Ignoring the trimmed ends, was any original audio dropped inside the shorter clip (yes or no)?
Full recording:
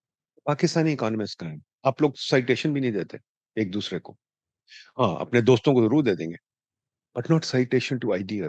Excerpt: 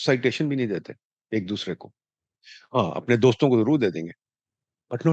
no